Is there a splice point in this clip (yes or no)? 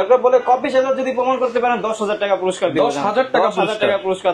no